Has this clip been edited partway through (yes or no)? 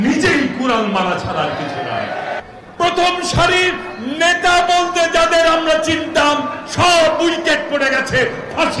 yes